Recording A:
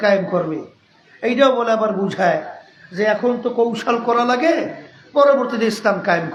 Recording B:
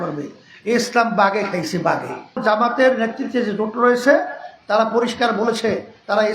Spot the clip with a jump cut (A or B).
B